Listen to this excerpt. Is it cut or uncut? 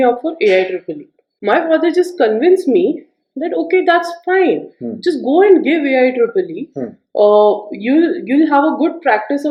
uncut